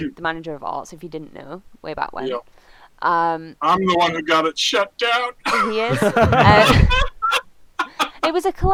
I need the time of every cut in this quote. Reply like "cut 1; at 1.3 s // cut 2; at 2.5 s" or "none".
none